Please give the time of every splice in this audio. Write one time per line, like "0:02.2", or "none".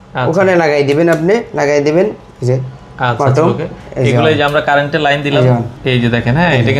0:05.7